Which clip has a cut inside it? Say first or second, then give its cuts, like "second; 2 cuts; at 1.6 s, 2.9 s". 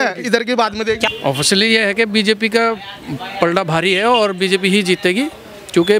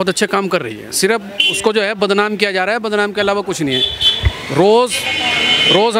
first; 1 cut; at 1.1 s